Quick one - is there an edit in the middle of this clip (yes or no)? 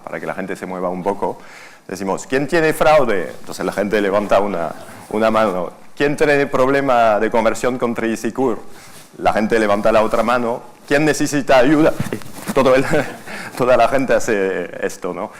yes